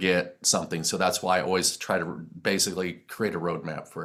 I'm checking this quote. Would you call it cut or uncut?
uncut